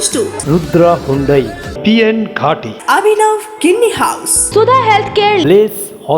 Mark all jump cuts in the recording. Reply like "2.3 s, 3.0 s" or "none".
4.3 s